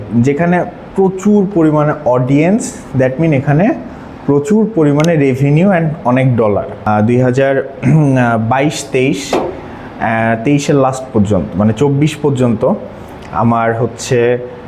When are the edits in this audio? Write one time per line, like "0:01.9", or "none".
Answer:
0:06.9